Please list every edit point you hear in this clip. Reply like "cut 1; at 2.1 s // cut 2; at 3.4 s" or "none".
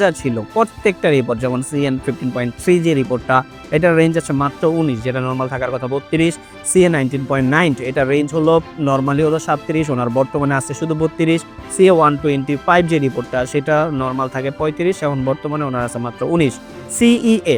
none